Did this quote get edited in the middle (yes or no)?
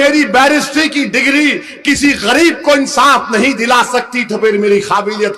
no